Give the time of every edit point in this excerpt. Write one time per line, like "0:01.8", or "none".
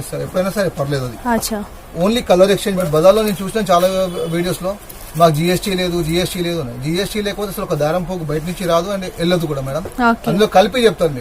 0:02.8